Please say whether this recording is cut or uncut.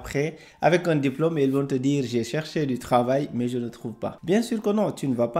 cut